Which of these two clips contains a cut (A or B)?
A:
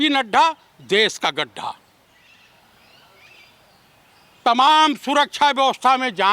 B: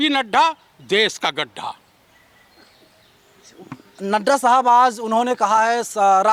A